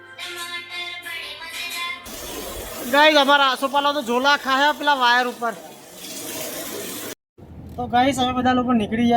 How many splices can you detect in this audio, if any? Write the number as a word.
two